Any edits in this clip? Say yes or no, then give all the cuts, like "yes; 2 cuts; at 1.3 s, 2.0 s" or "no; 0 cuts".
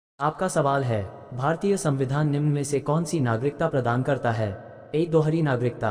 yes; 1 cut; at 1.2 s